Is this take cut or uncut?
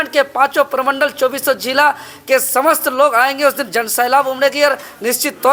uncut